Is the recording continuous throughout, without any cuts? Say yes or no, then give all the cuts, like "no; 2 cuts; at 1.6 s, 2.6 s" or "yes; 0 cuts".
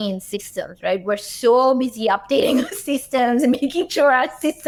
yes; 0 cuts